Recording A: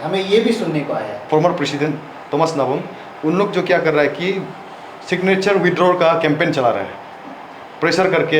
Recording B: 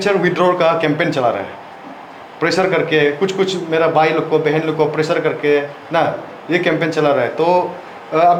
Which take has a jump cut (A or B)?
A